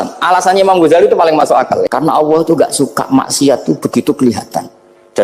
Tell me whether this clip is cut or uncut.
cut